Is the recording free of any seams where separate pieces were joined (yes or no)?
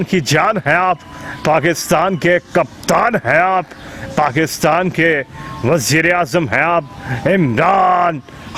yes